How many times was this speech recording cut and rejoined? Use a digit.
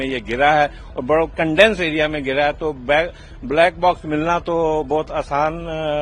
0